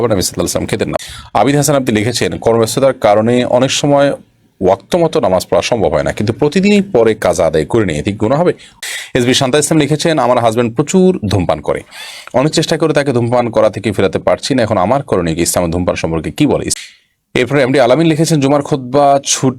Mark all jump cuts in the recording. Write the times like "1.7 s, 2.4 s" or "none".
1.0 s, 8.7 s, 16.7 s